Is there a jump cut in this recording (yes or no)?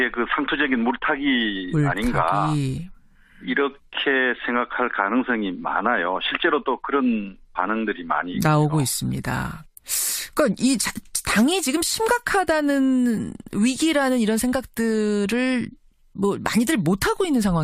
no